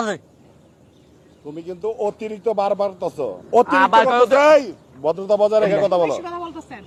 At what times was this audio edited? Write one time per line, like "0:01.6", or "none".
none